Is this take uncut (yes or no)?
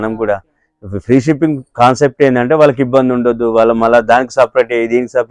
yes